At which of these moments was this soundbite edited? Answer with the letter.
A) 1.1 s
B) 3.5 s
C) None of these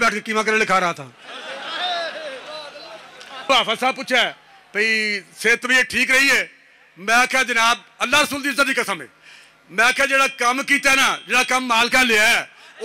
B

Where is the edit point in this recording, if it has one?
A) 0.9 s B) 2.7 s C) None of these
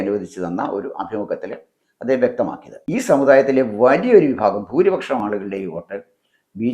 B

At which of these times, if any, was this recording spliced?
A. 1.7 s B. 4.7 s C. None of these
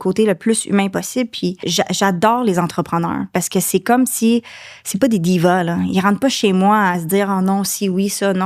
A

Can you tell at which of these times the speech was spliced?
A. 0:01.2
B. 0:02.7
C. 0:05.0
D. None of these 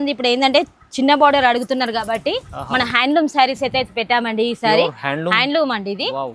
D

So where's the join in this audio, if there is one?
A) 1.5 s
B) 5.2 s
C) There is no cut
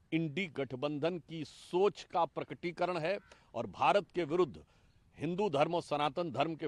C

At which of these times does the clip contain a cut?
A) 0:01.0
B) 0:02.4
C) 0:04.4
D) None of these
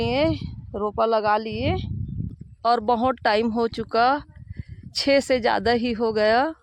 B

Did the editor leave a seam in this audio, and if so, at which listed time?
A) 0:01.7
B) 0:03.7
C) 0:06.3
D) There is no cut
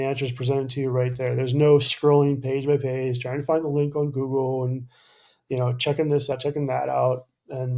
C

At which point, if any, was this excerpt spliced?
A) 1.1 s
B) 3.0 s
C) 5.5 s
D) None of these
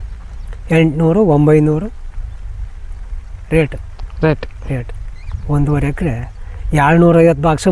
D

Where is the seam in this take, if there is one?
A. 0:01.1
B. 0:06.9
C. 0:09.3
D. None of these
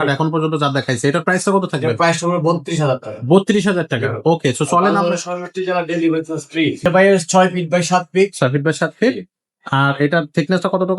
B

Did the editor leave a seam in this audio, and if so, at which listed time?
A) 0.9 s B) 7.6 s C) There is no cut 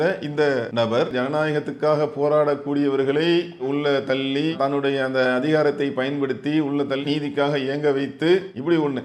A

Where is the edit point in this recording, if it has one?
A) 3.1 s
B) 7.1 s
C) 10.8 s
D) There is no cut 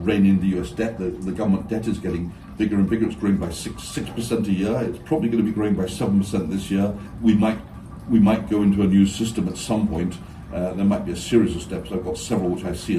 B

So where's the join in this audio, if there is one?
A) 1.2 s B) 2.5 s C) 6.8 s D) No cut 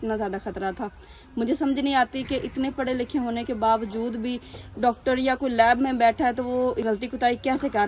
C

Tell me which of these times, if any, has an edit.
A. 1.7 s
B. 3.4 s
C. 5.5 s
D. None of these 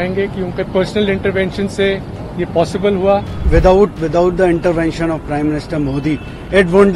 B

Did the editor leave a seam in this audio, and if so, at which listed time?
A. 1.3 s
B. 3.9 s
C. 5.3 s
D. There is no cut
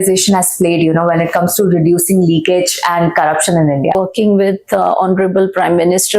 B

